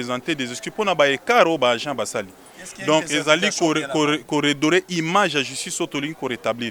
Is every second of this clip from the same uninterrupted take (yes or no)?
yes